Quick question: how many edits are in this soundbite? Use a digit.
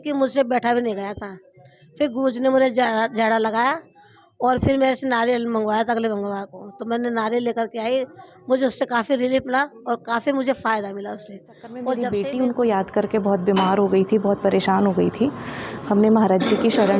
1